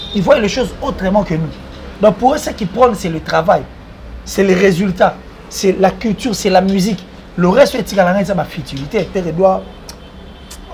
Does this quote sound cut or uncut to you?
cut